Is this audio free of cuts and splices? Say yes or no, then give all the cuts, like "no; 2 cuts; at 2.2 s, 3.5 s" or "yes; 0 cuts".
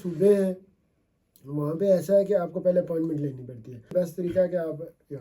no; 1 cut; at 3.9 s